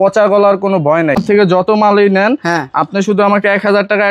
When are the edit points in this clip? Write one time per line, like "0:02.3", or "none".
0:01.2